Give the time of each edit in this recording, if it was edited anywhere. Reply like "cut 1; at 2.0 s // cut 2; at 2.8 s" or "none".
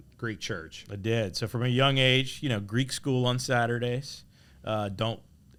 none